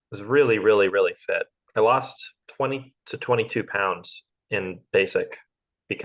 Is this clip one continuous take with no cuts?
no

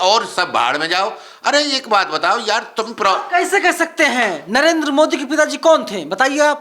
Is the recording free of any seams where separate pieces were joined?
yes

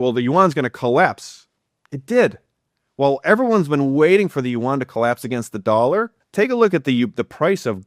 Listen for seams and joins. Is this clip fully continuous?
no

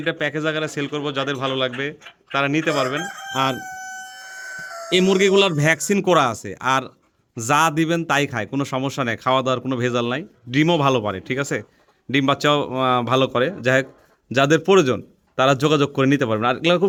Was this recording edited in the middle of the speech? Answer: no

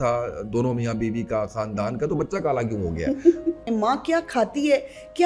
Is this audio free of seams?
no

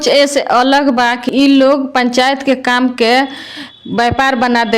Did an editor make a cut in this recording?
yes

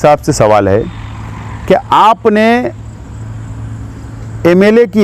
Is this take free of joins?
yes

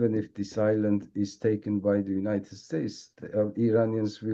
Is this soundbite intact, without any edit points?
yes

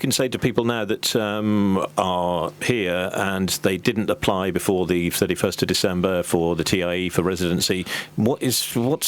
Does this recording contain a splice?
no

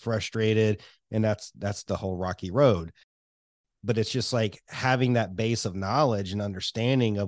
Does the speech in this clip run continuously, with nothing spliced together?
no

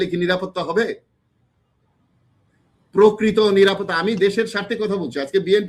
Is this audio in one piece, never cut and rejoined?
yes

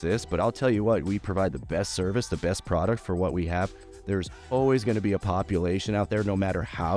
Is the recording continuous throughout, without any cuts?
yes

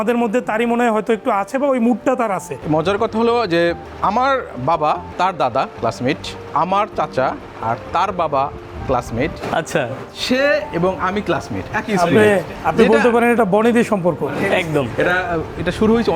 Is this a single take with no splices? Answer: no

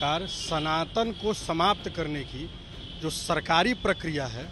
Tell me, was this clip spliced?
no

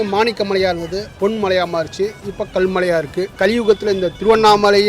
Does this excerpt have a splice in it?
yes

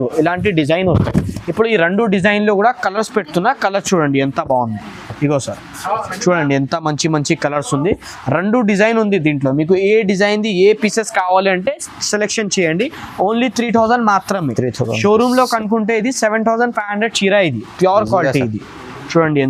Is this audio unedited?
yes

